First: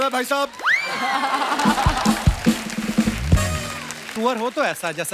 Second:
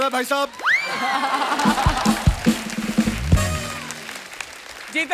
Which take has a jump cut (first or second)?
first